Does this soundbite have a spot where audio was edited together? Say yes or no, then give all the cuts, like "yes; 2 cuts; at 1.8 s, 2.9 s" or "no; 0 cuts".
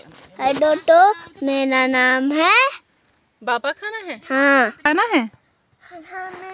yes; 1 cut; at 4.8 s